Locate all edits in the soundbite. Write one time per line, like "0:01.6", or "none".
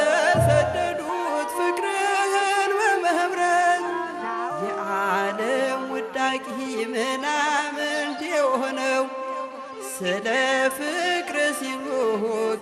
none